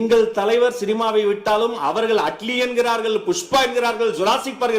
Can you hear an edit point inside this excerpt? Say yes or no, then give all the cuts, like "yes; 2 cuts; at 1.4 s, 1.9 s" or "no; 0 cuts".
no; 0 cuts